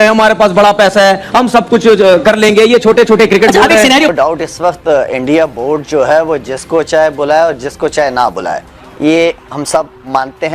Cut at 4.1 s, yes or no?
yes